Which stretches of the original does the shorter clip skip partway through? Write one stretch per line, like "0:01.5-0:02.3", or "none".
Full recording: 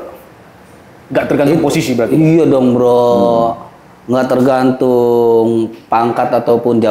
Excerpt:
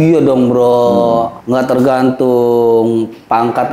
0:03.6-0:04.0